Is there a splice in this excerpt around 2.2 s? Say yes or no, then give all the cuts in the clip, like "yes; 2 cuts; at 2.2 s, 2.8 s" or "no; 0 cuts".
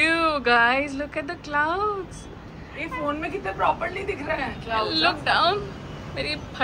no; 0 cuts